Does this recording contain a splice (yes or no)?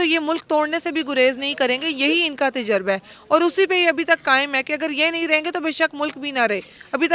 no